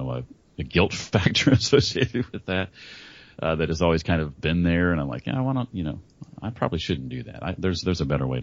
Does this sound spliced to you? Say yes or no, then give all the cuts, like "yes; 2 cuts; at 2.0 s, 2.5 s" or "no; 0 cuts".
no; 0 cuts